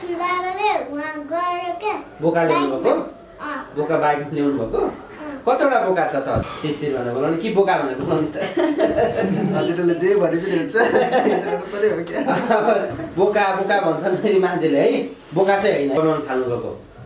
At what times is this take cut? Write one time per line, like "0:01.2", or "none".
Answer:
0:06.5
0:16.0